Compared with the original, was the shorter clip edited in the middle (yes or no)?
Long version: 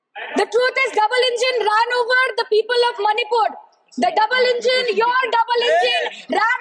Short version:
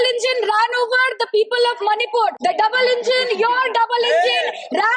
yes